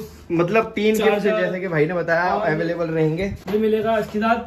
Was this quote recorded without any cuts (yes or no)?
no